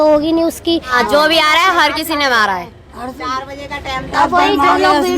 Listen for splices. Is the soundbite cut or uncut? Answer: cut